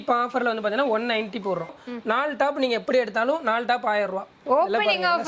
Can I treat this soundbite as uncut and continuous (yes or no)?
no